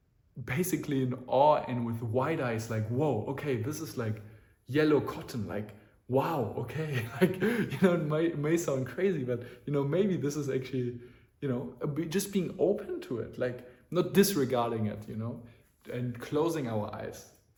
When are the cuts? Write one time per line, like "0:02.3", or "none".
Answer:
none